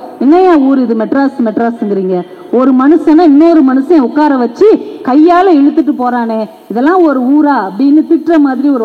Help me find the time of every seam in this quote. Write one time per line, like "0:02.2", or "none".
none